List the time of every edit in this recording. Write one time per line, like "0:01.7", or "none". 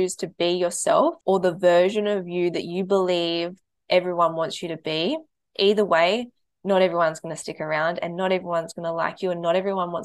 0:01.2